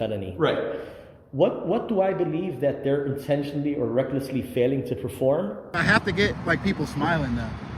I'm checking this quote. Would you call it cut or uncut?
cut